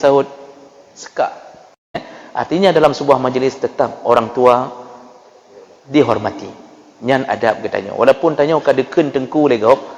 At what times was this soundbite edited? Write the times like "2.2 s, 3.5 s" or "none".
2.1 s